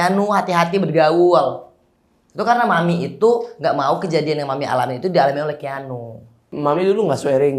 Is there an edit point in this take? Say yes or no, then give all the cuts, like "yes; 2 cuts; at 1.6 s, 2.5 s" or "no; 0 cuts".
yes; 1 cut; at 6.4 s